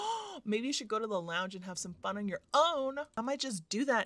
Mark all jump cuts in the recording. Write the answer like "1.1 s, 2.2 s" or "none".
3.1 s